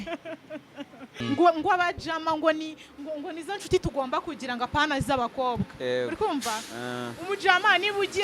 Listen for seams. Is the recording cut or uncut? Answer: cut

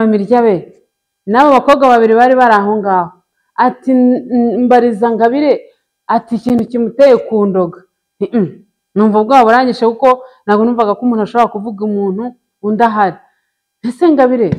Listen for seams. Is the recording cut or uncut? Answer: uncut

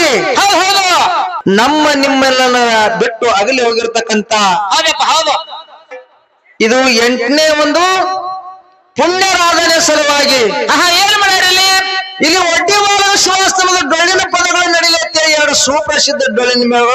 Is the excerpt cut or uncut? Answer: cut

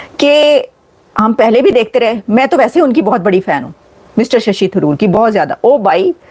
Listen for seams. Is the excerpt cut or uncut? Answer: uncut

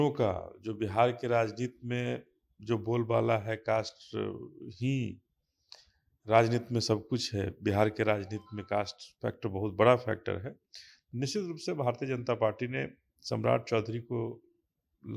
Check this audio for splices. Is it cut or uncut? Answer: uncut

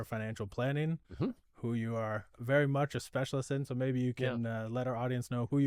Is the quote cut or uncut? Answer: uncut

